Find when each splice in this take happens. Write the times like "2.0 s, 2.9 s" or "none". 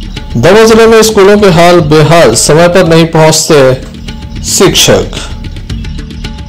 none